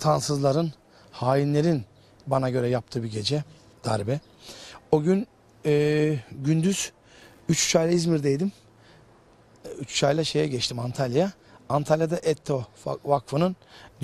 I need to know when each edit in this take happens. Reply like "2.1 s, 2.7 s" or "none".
none